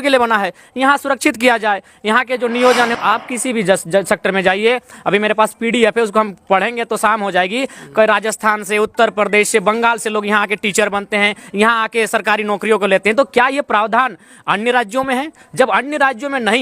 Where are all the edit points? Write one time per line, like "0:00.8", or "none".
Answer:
0:03.0